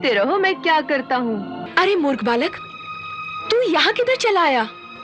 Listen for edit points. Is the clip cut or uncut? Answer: cut